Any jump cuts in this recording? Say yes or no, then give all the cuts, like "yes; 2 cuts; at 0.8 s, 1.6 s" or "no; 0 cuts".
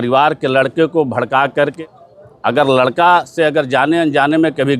yes; 1 cut; at 1.7 s